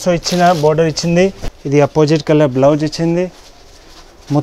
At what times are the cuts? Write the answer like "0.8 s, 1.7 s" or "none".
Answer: 1.5 s